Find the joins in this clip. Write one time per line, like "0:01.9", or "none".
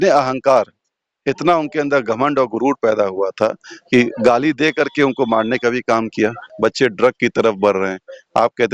0:06.4